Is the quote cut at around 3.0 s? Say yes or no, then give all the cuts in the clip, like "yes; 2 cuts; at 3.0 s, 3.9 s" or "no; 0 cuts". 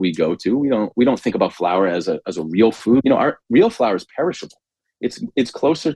yes; 1 cut; at 3.0 s